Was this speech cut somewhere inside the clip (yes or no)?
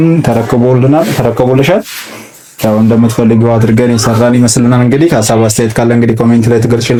no